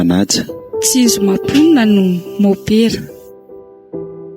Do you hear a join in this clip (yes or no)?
yes